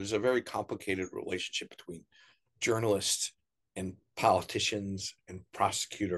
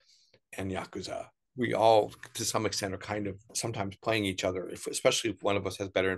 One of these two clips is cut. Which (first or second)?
second